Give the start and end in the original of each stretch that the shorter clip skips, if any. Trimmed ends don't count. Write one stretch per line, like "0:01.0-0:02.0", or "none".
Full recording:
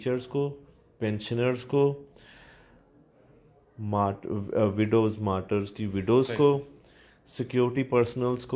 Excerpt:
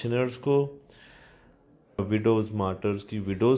0:03.3-0:04.7